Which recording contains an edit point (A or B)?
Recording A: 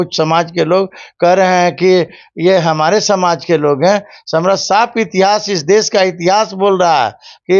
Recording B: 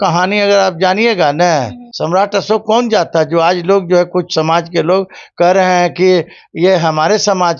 B